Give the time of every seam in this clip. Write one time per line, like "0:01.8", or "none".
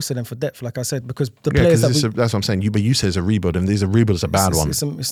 none